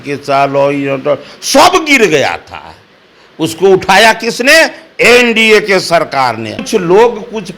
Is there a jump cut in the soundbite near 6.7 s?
yes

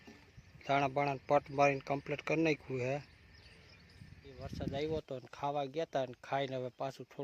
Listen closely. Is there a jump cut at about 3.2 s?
no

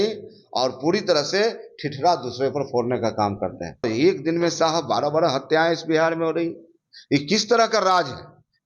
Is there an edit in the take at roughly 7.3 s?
no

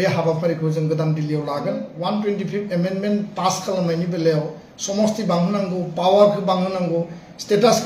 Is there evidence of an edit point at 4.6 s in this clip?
no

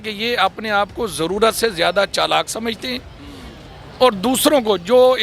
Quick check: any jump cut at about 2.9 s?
no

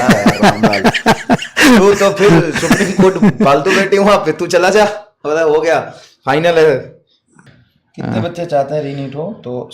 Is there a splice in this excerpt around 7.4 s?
yes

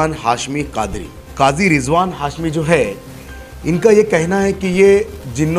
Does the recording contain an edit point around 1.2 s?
yes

